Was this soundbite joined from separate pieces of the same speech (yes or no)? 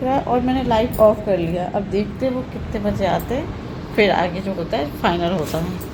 no